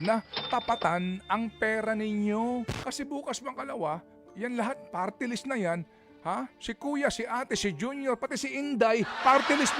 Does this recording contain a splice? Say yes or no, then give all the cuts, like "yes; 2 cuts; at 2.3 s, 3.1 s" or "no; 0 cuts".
yes; 1 cut; at 2.8 s